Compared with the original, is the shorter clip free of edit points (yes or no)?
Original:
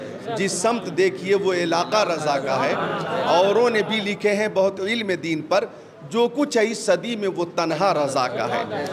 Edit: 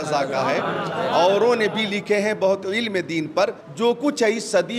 no